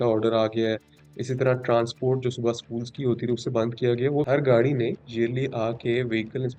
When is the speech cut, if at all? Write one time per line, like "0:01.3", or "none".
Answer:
0:04.1